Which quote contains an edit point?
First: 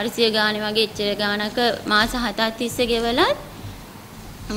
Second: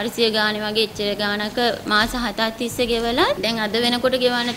second; 1 cut; at 3.4 s

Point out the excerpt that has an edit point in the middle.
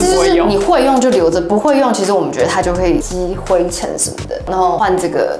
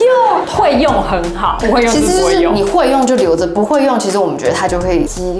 first; 1 cut; at 4.4 s

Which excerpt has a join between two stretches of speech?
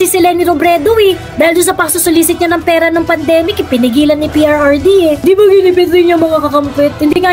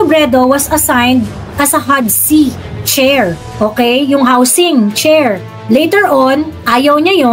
first; 1 cut; at 5.2 s

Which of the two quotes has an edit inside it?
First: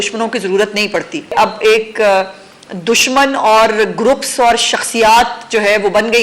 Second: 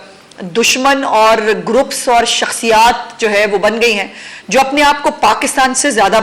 first; 1 cut; at 1.3 s

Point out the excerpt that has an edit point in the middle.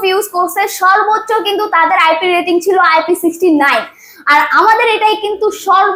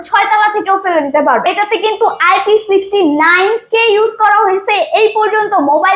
second; 1 cut; at 1.4 s

